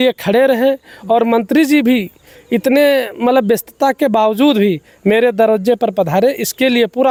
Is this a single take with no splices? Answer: yes; 0 cuts

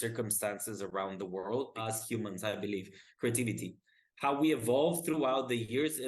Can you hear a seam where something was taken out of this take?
yes; 1 cut; at 1.8 s

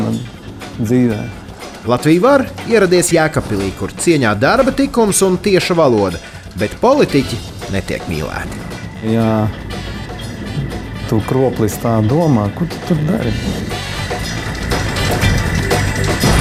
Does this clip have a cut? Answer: no; 0 cuts

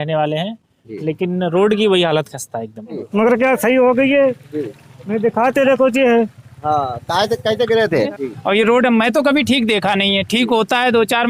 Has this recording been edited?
yes; 2 cuts; at 3.0 s, 8.1 s

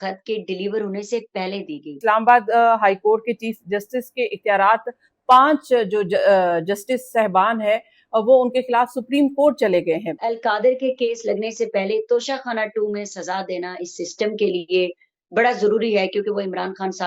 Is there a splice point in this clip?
yes; 2 cuts; at 2.0 s, 10.1 s

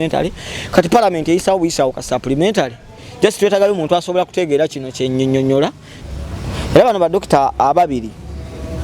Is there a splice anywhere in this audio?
yes; 1 cut; at 5.9 s

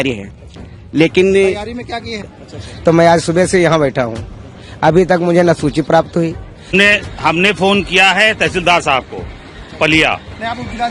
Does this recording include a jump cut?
yes; 2 cuts; at 2.2 s, 6.7 s

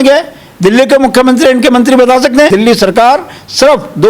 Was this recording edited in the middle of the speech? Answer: yes; 1 cut; at 2.5 s

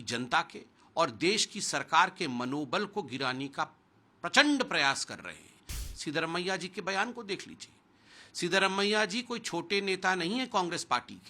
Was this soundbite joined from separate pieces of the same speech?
yes; 1 cut; at 5.7 s

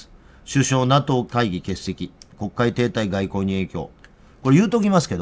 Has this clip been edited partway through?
no; 0 cuts

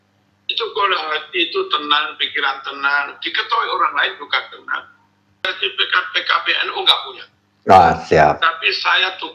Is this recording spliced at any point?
yes; 1 cut; at 5.4 s

